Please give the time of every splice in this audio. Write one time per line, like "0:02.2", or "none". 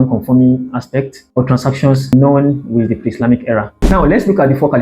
0:03.7